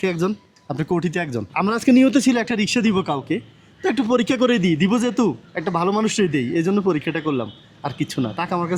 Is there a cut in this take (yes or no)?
yes